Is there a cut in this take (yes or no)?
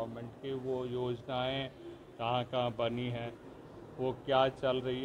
no